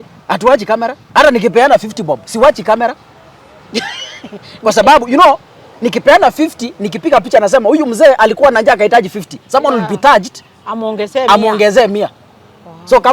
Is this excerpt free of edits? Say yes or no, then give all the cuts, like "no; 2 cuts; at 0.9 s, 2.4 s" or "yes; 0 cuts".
no; 1 cut; at 1.0 s